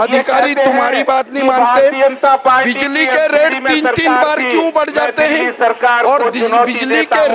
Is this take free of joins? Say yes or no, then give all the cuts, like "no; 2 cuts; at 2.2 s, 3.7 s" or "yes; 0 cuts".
yes; 0 cuts